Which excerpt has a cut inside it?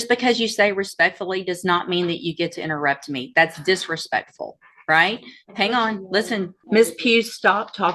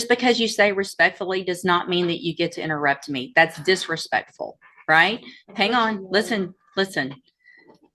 first; 1 cut; at 6.6 s

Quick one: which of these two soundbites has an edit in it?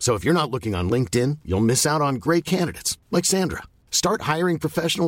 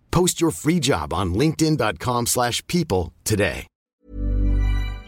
second; 1 cut; at 3.9 s

